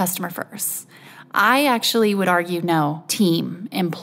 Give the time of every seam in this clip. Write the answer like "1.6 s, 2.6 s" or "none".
3.0 s